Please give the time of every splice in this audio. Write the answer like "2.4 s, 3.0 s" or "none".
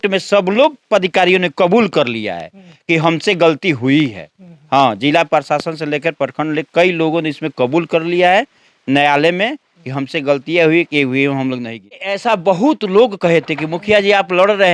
12.1 s